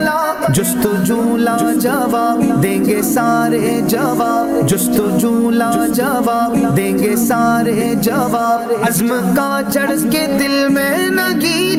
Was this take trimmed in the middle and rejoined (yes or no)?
no